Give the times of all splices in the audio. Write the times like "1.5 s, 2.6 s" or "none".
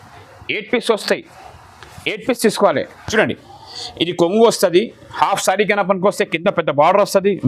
3.0 s

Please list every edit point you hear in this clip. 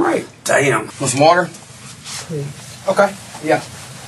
0.9 s

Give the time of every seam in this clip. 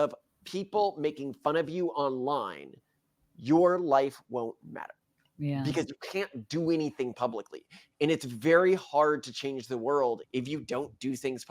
10.2 s

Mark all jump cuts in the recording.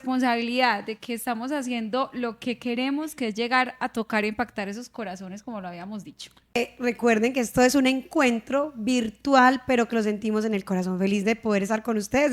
6.5 s

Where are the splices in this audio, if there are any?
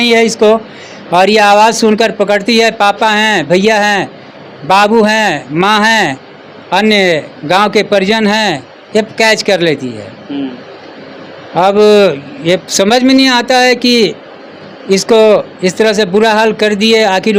none

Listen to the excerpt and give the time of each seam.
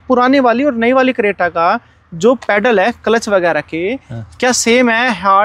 none

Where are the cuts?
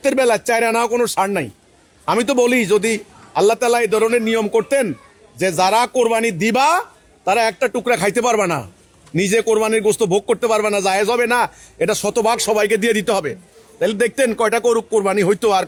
none

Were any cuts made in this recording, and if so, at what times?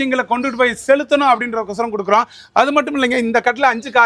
none

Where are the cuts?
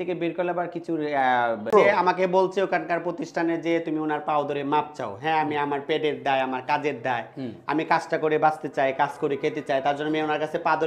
1.7 s

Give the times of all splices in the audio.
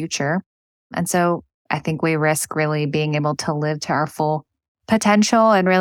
1.5 s

